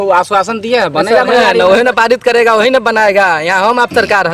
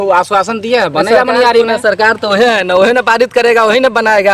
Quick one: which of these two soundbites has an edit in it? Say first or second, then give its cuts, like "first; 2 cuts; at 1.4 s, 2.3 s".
first; 1 cut; at 1.5 s